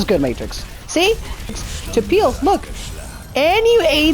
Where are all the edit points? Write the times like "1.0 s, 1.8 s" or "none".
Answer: 1.6 s